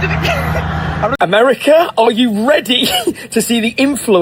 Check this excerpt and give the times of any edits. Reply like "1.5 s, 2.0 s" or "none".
1.2 s